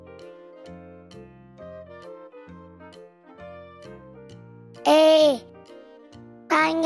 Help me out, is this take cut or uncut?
cut